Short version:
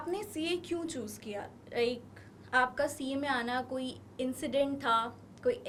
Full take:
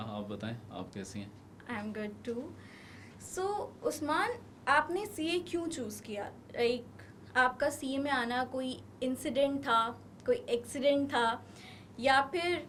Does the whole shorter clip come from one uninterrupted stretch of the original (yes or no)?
yes